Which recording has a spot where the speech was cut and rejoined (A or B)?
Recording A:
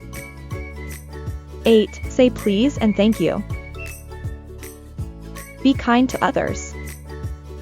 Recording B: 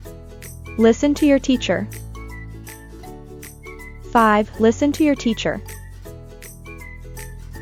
A